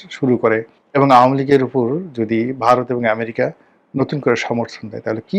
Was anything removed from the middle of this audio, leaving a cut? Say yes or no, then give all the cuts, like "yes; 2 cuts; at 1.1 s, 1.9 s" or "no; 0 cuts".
no; 0 cuts